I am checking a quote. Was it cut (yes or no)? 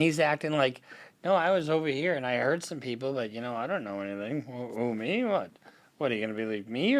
no